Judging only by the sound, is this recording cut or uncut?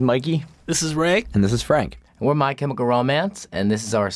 uncut